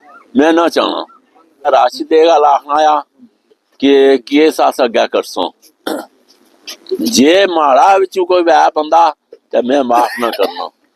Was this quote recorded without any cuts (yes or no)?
no